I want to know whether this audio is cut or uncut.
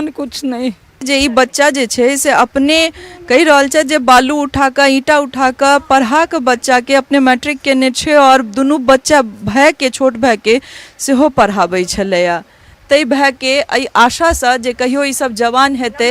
cut